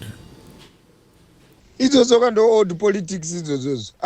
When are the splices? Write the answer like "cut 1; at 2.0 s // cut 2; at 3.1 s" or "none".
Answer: cut 1; at 1.6 s